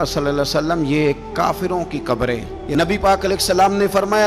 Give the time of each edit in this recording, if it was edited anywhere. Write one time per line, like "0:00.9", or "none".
0:02.5